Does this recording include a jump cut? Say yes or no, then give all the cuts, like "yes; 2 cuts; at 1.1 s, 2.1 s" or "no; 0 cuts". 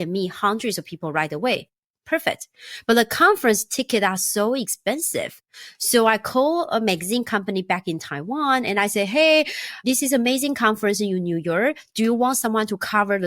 yes; 1 cut; at 9.8 s